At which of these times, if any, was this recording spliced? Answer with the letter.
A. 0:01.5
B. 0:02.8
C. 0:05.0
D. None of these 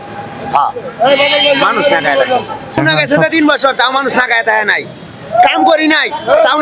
B